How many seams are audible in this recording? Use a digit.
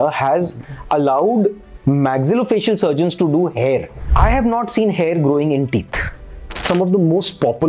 2